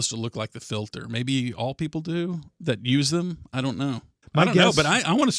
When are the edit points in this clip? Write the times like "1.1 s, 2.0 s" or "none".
4.1 s